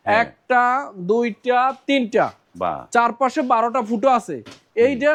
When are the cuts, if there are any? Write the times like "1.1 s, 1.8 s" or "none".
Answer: none